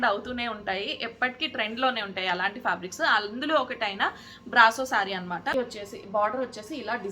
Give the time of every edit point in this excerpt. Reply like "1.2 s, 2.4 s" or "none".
5.6 s